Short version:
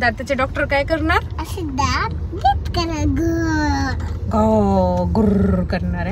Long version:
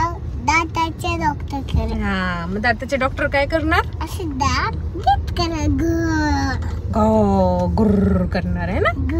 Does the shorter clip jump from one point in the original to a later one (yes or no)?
no